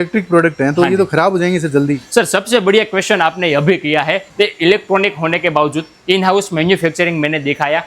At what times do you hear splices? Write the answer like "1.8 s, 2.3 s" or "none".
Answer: 4.3 s

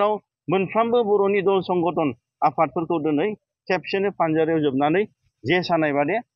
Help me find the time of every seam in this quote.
none

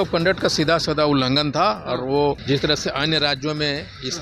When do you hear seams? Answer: 2.4 s

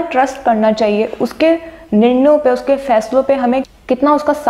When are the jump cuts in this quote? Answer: none

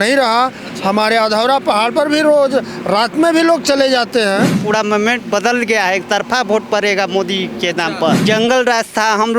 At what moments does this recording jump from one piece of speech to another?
4.6 s, 8.2 s

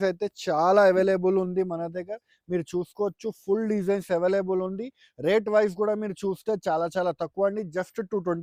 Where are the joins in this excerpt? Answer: none

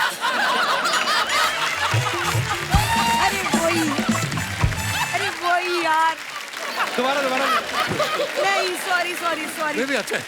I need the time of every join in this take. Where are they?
none

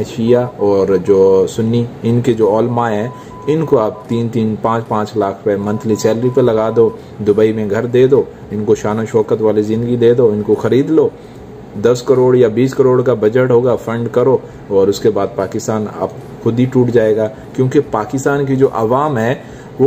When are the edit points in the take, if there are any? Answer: none

